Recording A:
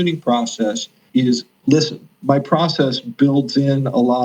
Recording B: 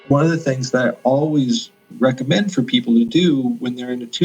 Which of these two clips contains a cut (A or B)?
A